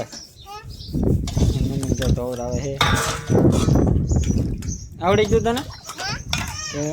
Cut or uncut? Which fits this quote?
uncut